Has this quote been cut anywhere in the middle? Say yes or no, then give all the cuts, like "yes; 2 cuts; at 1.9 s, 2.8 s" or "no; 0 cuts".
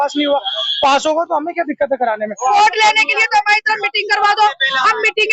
yes; 1 cut; at 2.5 s